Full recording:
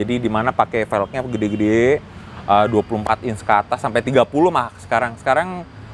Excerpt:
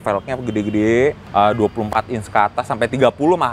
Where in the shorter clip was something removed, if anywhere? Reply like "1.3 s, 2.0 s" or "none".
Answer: 1.2 s